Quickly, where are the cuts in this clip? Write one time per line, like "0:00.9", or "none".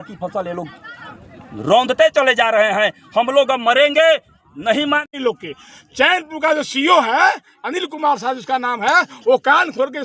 0:05.1

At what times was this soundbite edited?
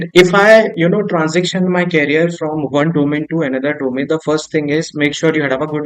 none

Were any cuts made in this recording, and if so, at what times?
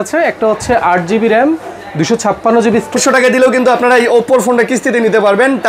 0:03.0

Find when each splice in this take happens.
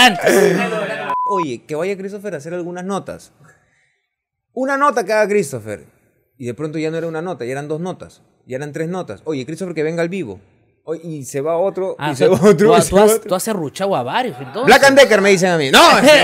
0:01.2

